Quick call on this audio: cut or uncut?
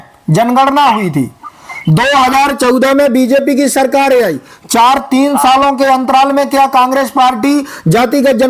uncut